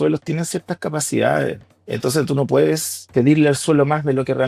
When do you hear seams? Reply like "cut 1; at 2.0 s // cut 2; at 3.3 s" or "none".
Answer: cut 1; at 1.7 s // cut 2; at 3.1 s